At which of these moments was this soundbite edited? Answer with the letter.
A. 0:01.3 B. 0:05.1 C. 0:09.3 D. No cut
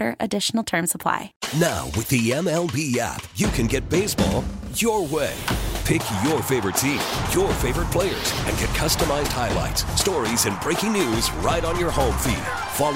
A